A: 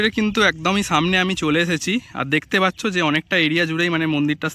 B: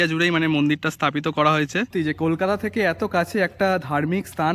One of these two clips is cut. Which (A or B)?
B